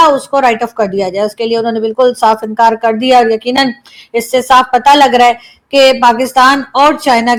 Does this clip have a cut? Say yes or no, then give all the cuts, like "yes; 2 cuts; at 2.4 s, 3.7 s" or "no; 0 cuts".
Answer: no; 0 cuts